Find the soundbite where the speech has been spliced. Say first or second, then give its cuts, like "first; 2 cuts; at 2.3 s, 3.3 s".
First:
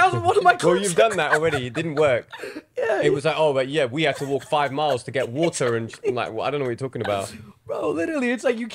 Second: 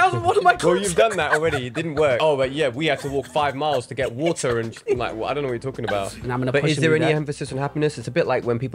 second; 2 cuts; at 2.2 s, 6.2 s